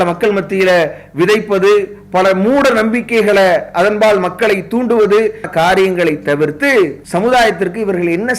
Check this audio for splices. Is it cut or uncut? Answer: cut